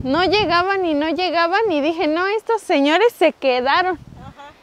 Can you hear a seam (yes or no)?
no